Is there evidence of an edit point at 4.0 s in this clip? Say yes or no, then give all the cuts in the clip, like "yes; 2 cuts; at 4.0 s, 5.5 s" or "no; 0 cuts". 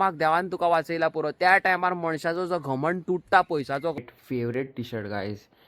yes; 1 cut; at 4.0 s